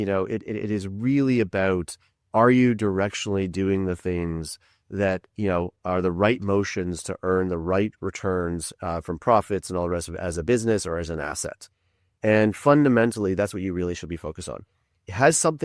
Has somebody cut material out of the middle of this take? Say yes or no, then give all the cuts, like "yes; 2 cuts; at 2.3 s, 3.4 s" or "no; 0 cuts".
no; 0 cuts